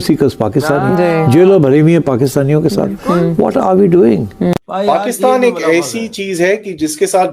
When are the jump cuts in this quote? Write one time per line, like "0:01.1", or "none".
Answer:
0:04.5